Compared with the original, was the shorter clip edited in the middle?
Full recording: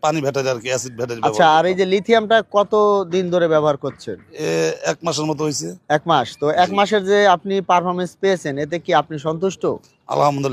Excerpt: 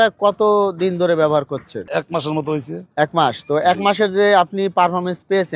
yes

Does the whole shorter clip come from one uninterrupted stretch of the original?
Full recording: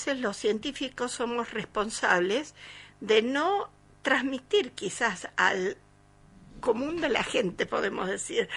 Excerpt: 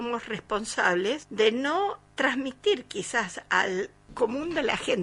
no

